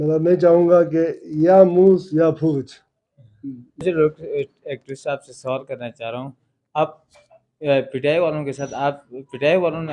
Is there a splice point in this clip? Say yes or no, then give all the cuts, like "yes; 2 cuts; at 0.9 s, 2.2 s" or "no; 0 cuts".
yes; 1 cut; at 3.8 s